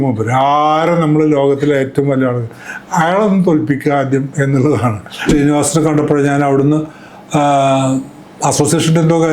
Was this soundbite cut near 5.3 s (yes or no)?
yes